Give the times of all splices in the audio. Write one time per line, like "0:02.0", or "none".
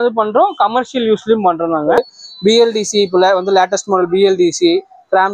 0:02.0